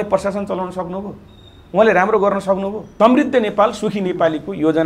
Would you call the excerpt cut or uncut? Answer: cut